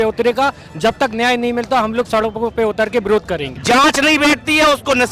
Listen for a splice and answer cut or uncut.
cut